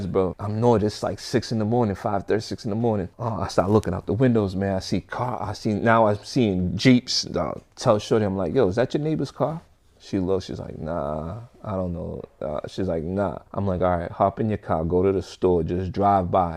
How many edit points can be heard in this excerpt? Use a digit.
0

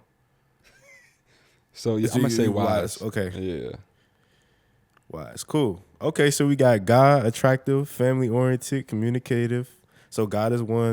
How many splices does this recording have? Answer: 0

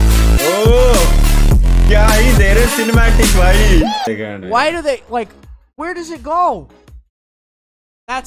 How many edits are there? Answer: 1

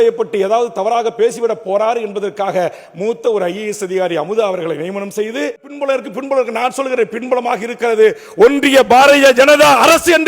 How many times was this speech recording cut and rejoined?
1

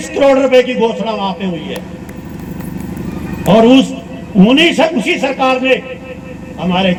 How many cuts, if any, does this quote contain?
0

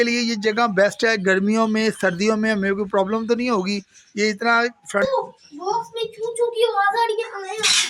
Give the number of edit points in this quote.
1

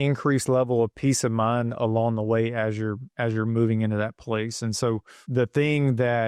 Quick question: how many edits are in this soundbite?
1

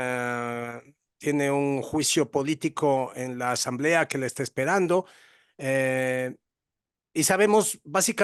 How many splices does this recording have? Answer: 0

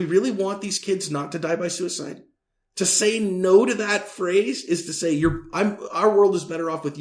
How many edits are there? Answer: 0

